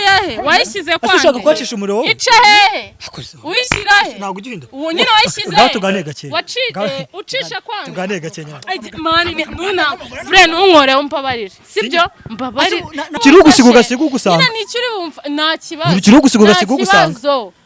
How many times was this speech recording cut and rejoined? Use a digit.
1